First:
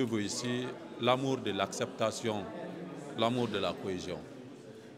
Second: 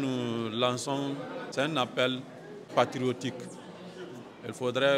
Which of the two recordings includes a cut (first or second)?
second